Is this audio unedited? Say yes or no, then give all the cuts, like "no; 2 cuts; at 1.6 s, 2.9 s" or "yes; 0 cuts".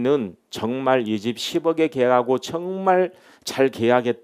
yes; 0 cuts